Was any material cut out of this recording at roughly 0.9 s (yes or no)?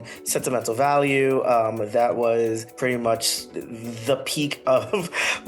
no